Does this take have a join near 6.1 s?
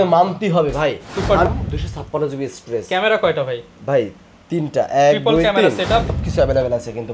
yes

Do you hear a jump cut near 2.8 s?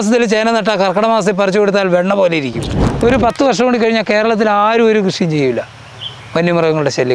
yes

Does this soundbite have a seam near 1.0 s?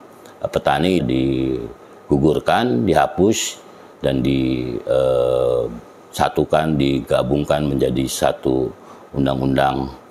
yes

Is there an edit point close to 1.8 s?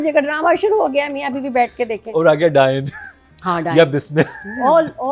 no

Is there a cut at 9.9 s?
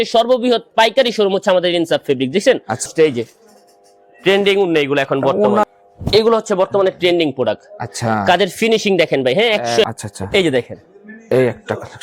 yes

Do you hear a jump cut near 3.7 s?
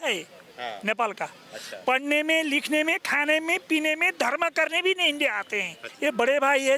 no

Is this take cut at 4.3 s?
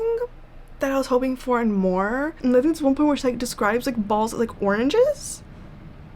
no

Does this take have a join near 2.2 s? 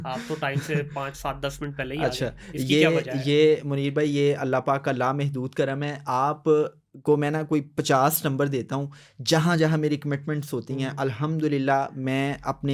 no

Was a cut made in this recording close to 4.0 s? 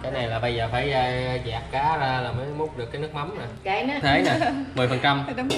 yes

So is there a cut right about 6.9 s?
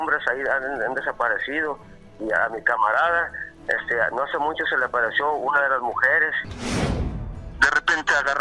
yes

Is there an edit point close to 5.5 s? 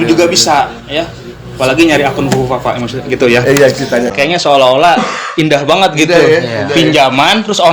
no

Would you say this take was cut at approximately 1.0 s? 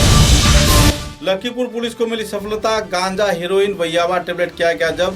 yes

